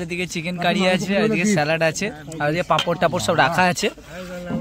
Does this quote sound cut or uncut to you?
uncut